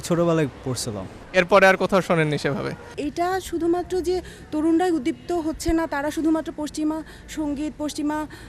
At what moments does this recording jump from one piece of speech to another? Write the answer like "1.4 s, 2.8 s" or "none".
3.0 s

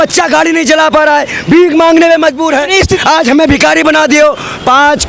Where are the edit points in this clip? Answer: 2.9 s

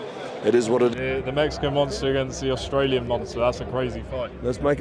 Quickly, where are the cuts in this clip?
0.9 s

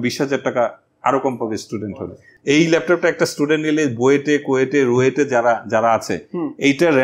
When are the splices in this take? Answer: 2.3 s

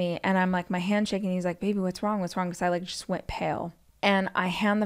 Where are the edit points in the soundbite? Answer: 3.8 s

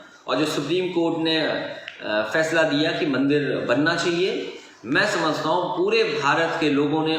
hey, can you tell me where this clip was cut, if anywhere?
none

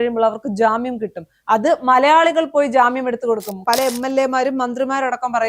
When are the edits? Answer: 3.5 s

